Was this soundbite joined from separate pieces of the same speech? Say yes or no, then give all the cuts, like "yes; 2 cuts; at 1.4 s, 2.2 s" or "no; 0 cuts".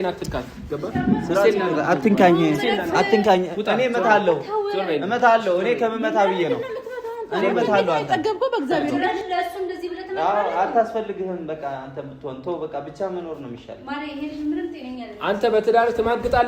yes; 2 cuts; at 9.0 s, 15.4 s